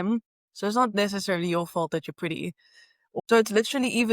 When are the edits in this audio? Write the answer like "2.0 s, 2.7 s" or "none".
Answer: 3.0 s